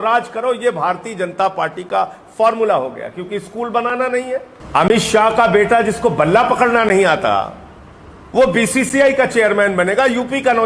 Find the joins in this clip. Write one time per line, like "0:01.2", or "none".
0:04.6